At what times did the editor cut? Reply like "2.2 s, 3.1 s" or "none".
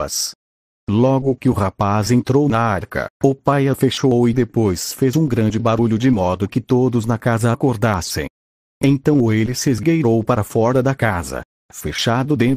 11.4 s